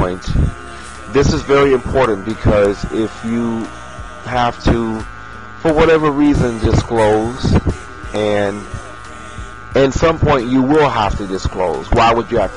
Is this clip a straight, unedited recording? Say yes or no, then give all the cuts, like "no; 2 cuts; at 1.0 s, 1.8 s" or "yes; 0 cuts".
yes; 0 cuts